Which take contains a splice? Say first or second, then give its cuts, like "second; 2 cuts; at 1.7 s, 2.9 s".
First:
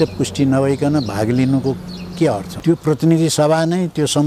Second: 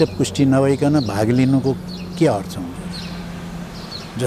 first; 1 cut; at 2.5 s